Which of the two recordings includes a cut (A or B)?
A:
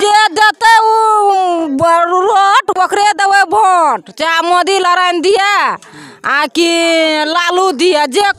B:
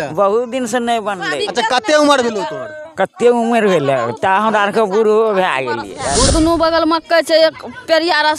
B